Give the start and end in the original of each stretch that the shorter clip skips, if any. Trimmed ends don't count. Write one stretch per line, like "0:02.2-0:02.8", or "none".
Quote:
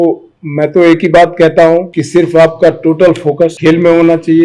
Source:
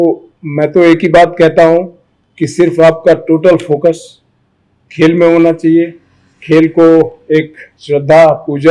0:02.0-0:02.4
0:04.0-0:04.9